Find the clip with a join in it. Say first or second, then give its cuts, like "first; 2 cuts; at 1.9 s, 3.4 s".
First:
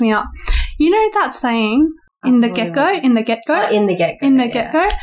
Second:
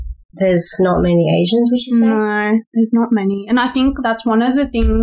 first; 1 cut; at 2.1 s